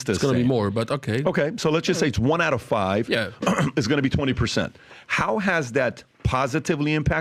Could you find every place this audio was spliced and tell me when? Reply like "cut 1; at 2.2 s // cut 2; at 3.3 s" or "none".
none